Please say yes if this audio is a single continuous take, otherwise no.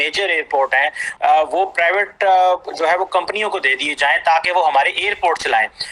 yes